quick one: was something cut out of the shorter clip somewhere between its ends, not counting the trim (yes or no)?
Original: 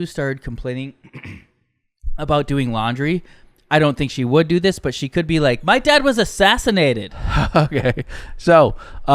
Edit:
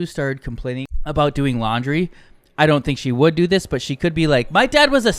yes